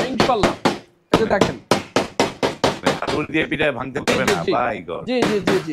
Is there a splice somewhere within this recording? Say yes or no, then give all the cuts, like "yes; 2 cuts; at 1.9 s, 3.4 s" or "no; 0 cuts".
no; 0 cuts